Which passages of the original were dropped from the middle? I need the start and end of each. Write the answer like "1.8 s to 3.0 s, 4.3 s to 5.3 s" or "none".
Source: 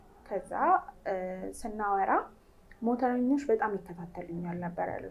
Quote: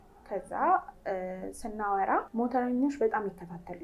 2.3 s to 2.8 s